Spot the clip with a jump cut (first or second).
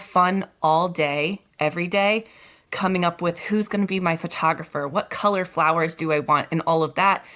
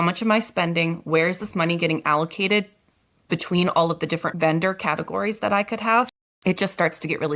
second